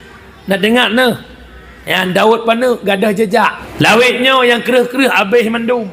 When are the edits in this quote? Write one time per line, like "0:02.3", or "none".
0:03.6